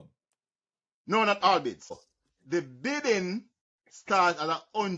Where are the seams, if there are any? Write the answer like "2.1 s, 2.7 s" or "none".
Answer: 1.9 s